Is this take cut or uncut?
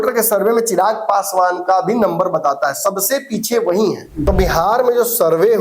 cut